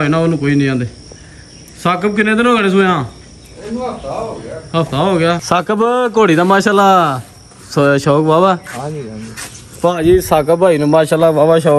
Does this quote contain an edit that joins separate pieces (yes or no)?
yes